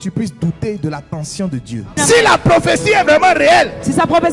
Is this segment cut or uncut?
cut